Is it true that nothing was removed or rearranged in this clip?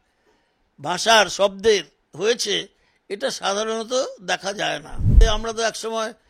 no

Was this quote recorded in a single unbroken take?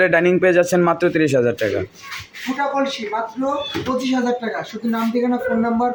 yes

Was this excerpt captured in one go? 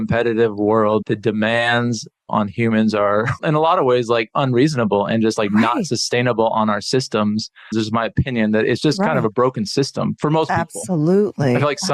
no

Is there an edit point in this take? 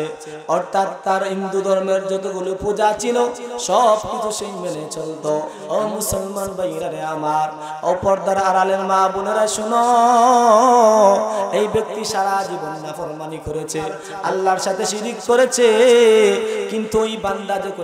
yes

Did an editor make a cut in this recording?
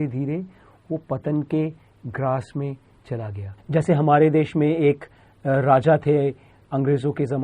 yes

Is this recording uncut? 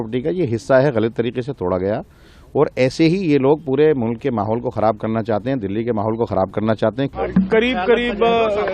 no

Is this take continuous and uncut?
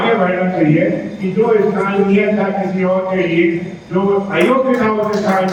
yes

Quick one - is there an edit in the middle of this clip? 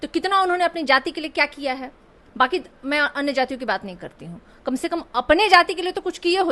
no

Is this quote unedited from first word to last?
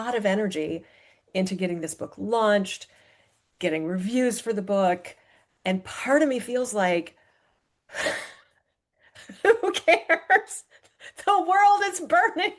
yes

